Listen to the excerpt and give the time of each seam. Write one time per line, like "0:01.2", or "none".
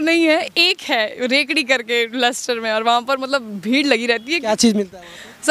none